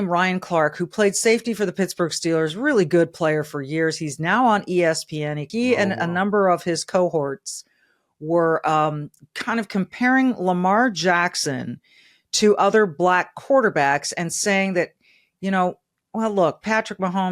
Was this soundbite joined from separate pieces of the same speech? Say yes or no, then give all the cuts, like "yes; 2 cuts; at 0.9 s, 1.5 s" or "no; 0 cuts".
yes; 2 cuts; at 5.4 s, 9.1 s